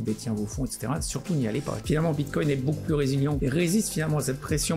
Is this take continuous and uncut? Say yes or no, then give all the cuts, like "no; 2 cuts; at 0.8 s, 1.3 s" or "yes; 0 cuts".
no; 2 cuts; at 1.8 s, 3.4 s